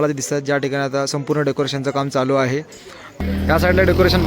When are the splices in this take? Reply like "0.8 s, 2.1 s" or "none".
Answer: 3.1 s

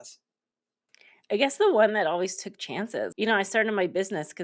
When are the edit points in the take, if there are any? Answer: 3.1 s

